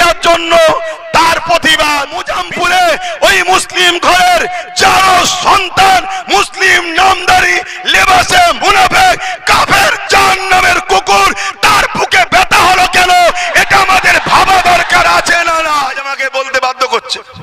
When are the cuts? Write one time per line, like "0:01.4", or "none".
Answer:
0:02.3
0:16.1